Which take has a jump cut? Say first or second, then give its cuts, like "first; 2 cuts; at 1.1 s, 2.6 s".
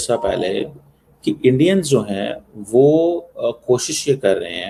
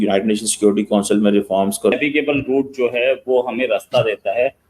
second; 1 cut; at 1.9 s